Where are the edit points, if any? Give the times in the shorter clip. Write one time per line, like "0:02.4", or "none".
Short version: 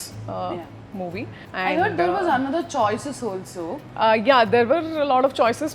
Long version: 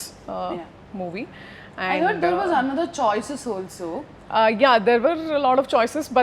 0:01.4
0:03.8